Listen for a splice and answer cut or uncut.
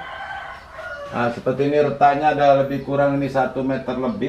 uncut